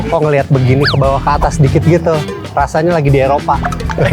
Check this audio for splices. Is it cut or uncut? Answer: uncut